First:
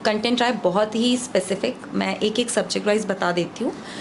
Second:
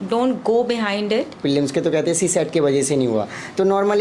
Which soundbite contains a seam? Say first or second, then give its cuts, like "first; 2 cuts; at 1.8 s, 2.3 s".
second; 1 cut; at 1.4 s